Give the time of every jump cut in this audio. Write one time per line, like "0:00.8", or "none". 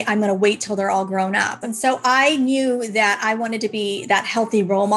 0:01.6